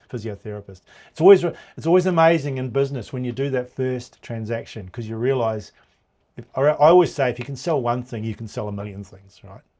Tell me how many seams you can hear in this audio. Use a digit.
0